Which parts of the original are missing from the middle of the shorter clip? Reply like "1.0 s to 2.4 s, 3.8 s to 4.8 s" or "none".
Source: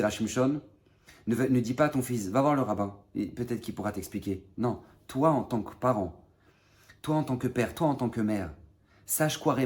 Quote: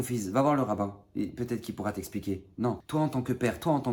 4.8 s to 7.0 s